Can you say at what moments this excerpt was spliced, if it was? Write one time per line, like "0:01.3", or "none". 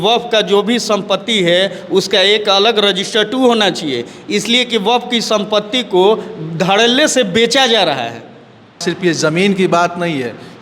0:08.8